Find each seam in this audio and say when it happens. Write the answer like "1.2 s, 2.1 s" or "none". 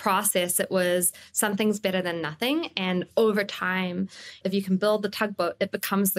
4.4 s